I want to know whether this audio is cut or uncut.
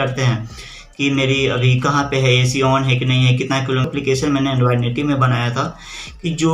cut